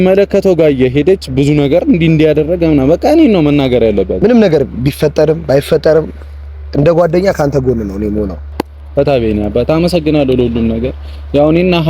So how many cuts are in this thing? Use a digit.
2